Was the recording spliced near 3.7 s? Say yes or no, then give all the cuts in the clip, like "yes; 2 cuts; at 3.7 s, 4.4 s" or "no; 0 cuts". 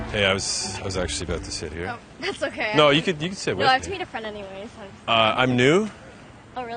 no; 0 cuts